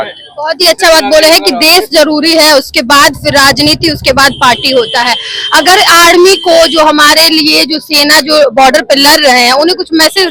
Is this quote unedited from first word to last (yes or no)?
yes